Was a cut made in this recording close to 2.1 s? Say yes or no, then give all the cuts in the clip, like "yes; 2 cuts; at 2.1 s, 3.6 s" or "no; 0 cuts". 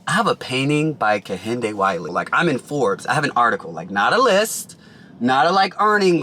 yes; 1 cut; at 2.1 s